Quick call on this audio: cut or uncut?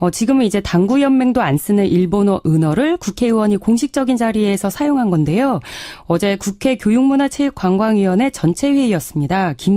cut